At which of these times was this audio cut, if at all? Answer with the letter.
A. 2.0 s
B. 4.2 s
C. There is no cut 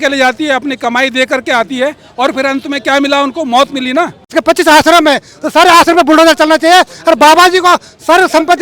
B